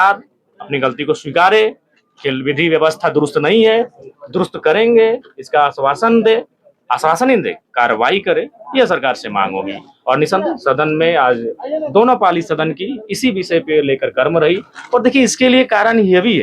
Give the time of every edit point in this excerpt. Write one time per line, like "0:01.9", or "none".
none